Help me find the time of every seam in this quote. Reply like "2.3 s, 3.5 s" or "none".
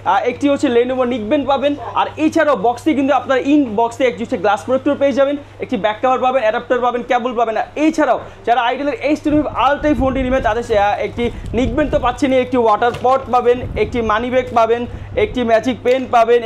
none